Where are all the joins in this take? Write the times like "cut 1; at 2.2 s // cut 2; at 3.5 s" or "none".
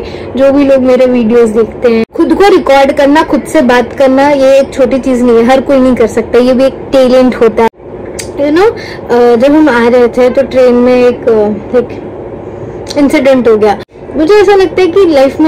cut 1; at 2.1 s // cut 2; at 7.7 s // cut 3; at 14.1 s